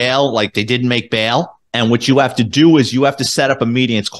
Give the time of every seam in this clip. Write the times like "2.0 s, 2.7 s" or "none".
1.6 s